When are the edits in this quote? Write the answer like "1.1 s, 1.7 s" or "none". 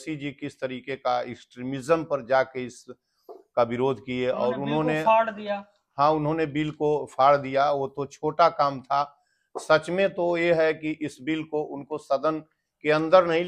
none